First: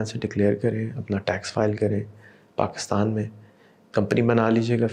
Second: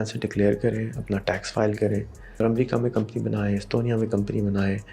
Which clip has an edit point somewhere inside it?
second; 1 cut; at 2.4 s

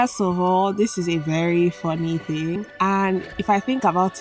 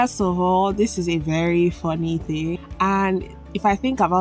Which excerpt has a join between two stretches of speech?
first; 1 cut; at 3.3 s

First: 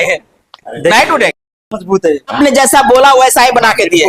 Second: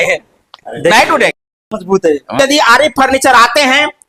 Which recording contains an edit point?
first; 1 cut; at 2.3 s

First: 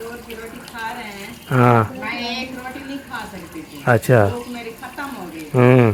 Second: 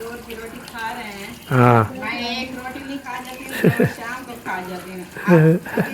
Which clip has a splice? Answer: second; 1 cut; at 3.0 s

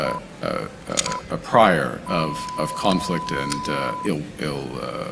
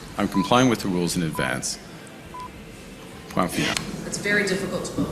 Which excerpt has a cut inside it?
second; 1 cut; at 3.8 s

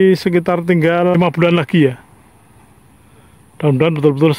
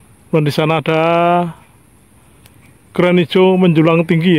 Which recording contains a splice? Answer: first; 1 cut; at 1.1 s

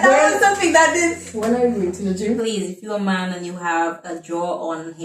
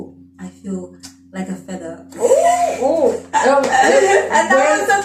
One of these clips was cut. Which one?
first; 1 cut; at 2.0 s

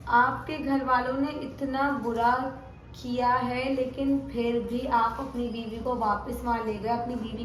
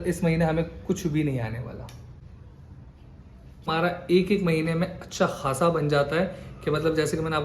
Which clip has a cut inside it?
second; 1 cut; at 3.7 s

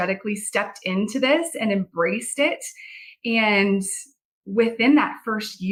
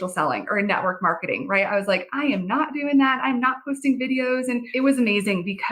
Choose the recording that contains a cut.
second; 1 cut; at 4.7 s

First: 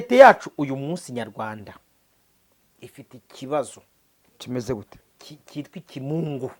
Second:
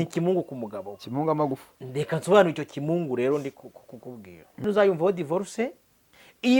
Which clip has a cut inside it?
second; 1 cut; at 4.6 s

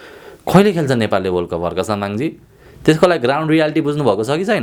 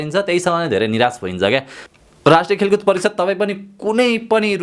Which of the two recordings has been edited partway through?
second; 1 cut; at 1.8 s

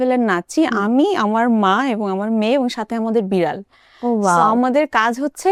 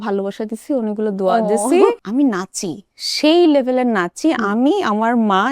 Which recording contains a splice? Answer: second; 1 cut; at 2.0 s

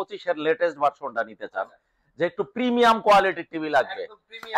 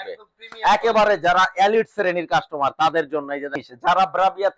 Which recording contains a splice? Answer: second; 1 cut; at 3.7 s

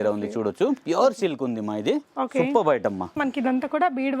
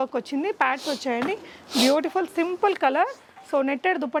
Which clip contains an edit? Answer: first; 1 cut; at 3.1 s

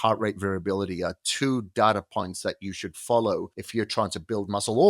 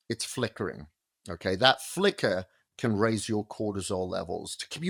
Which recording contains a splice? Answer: first; 1 cut; at 3.6 s

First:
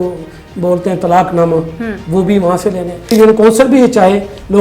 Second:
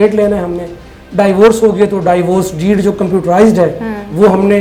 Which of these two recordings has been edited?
first; 1 cut; at 3.1 s

